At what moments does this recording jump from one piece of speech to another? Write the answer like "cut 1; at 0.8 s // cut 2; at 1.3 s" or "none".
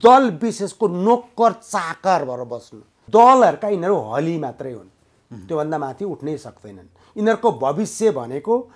cut 1; at 3.0 s